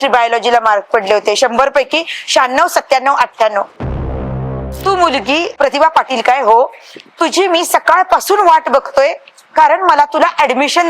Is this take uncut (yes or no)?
no